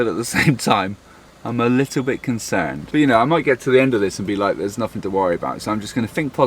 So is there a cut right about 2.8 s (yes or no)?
yes